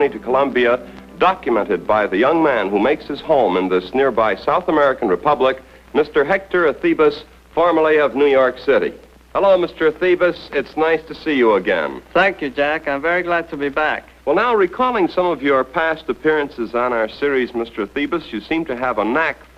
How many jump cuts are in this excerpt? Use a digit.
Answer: 0